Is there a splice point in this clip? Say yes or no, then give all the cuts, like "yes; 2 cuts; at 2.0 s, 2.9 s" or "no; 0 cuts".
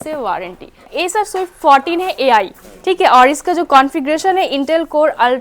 yes; 1 cut; at 0.9 s